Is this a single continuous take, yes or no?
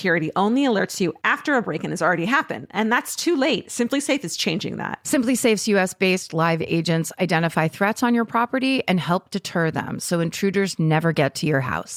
yes